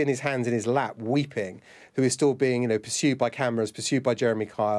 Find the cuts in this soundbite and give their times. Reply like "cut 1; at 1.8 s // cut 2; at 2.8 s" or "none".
none

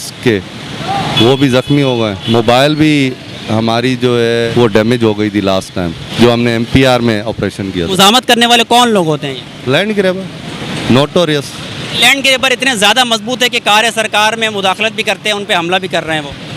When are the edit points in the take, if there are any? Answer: cut 1; at 2.2 s // cut 2; at 4.5 s // cut 3; at 6.0 s // cut 4; at 7.9 s // cut 5; at 12.0 s

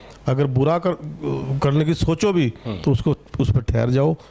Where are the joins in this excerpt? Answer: none

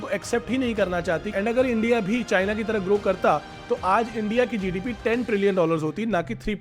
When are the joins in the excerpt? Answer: cut 1; at 1.3 s

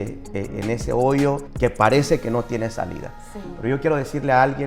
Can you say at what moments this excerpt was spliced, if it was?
cut 1; at 1.5 s

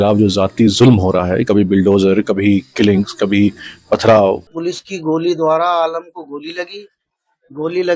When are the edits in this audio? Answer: cut 1; at 4.5 s

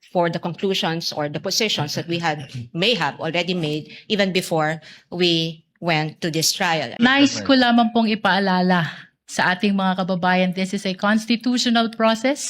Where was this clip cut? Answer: cut 1; at 6.9 s

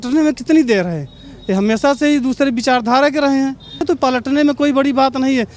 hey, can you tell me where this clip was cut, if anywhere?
cut 1; at 3.8 s

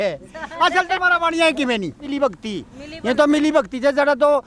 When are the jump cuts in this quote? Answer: cut 1; at 2.1 s

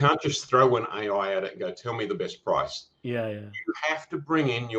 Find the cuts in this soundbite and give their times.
none

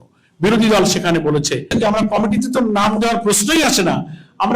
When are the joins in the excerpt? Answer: cut 1; at 1.7 s

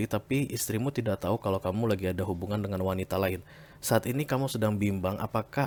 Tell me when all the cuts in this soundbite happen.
none

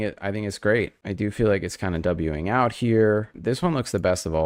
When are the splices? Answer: cut 1; at 3.3 s

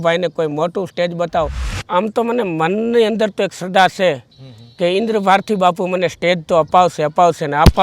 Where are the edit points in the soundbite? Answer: cut 1; at 1.8 s

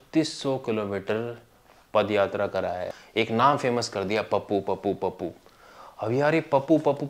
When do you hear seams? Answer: cut 1; at 2.9 s

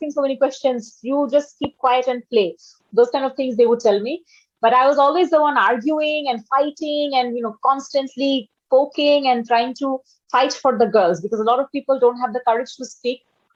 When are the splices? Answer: none

